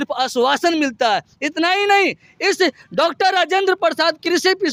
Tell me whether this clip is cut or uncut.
uncut